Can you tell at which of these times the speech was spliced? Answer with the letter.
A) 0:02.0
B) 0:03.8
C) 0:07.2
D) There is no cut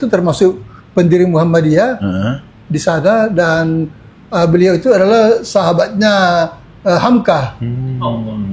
D